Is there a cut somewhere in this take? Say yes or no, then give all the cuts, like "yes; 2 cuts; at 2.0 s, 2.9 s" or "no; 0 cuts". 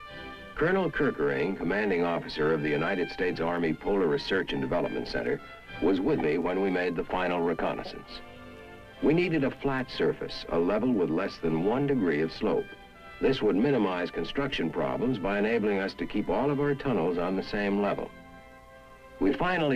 yes; 1 cut; at 14.8 s